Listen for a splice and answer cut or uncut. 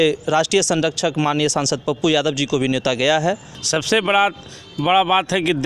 cut